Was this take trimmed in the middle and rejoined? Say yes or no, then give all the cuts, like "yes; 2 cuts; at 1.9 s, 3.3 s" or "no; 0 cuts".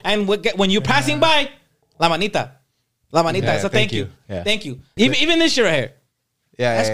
yes; 1 cut; at 4.8 s